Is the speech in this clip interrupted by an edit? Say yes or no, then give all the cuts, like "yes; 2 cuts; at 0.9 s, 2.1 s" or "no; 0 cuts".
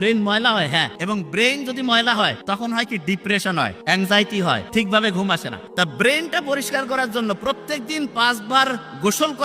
yes; 5 cuts; at 0.9 s, 2.4 s, 3.8 s, 4.6 s, 5.6 s